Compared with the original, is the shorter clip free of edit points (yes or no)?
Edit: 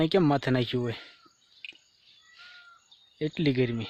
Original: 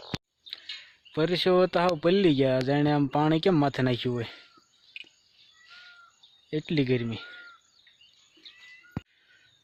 yes